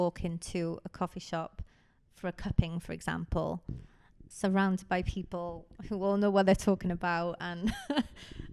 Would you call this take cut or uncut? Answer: uncut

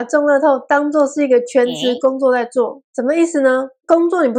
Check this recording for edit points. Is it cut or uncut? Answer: uncut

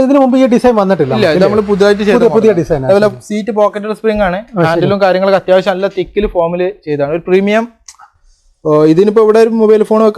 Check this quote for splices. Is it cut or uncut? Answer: cut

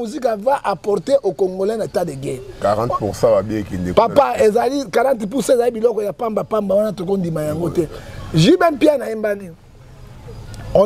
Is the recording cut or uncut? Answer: uncut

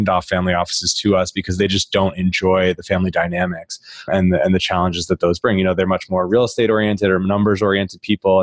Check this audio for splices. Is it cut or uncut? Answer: uncut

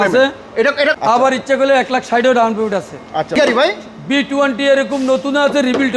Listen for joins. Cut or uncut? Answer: cut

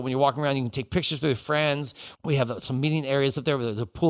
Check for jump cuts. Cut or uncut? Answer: cut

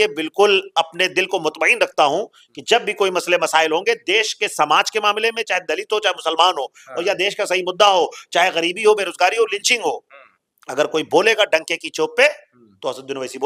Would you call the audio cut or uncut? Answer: uncut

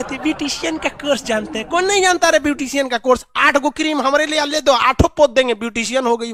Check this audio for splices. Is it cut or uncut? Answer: uncut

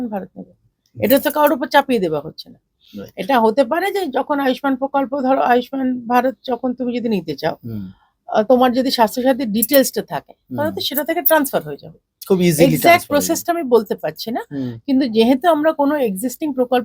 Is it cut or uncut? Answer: uncut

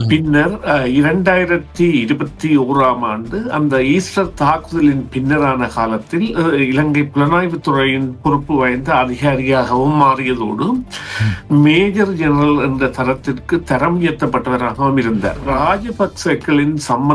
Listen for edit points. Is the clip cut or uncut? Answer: cut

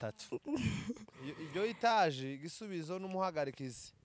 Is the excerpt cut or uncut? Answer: uncut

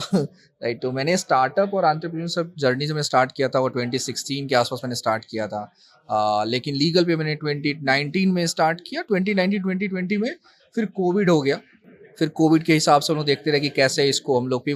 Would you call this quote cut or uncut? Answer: uncut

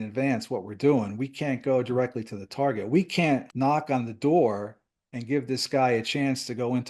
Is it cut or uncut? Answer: cut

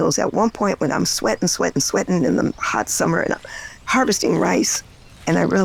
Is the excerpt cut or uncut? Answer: uncut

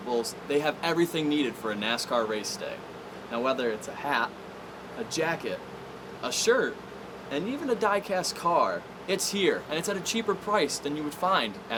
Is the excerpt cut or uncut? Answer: uncut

